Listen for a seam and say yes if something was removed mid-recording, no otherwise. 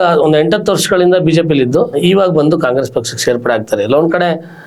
no